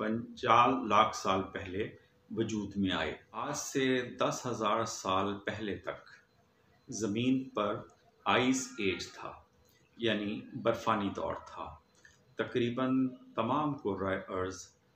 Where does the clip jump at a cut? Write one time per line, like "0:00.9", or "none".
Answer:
0:03.6